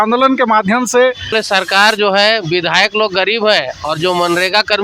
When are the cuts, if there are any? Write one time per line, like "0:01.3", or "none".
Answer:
0:01.4

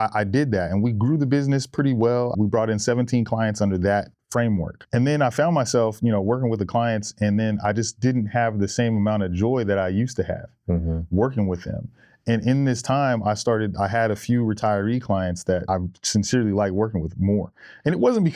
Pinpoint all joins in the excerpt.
0:02.3
0:04.5
0:15.7

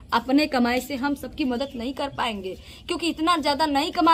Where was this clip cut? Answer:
none

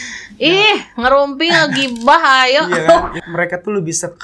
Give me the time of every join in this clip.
0:03.1

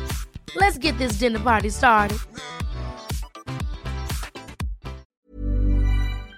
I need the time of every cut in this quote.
0:05.1

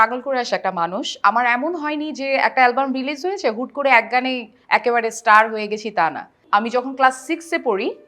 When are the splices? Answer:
0:06.3

